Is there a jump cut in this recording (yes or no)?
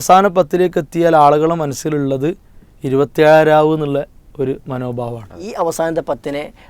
yes